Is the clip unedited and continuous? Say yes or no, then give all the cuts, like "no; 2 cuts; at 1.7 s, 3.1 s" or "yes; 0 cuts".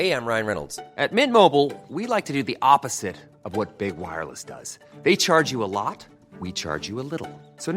yes; 0 cuts